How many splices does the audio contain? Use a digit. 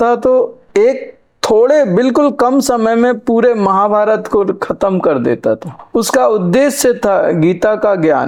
0